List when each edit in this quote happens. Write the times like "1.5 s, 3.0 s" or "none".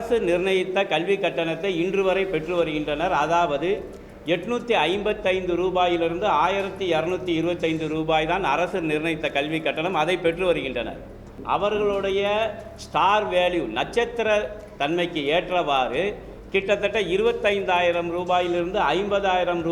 11.3 s